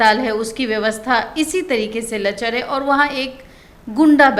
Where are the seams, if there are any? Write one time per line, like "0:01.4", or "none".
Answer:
none

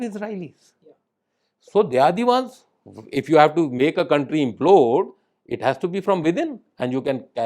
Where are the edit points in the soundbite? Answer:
none

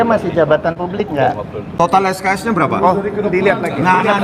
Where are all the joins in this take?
0:01.6
0:02.9

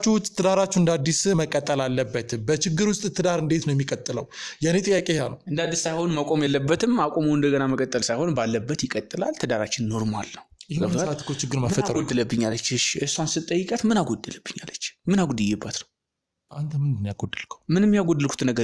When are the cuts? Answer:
none

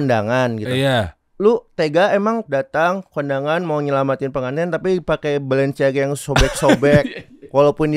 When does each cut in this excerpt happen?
0:01.2
0:02.4

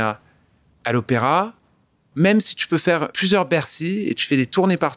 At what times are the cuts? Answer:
0:02.0
0:03.1

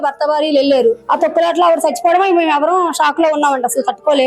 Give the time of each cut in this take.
0:01.0

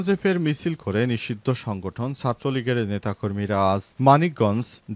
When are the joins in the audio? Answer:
none

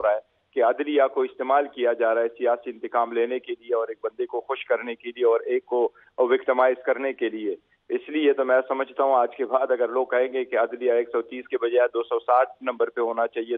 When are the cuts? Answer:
none

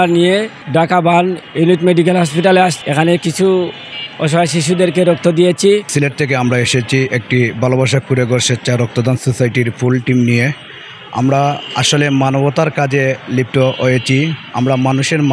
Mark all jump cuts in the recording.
0:01.4
0:02.8
0:05.9

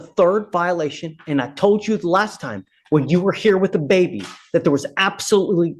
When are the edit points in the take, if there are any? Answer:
none

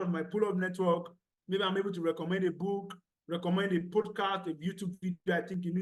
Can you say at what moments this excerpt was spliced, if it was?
none

